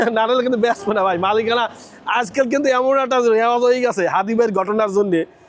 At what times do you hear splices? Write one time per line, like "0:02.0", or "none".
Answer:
none